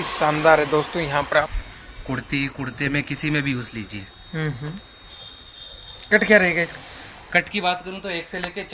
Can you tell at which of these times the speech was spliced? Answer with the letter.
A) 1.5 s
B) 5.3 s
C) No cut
A